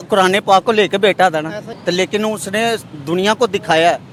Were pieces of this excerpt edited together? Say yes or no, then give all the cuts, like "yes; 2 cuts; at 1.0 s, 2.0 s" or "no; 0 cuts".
no; 0 cuts